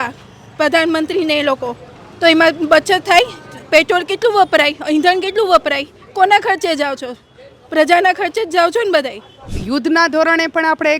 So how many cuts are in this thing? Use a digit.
1